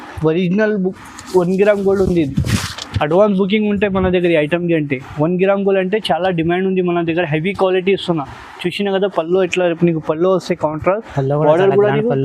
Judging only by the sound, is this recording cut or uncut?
uncut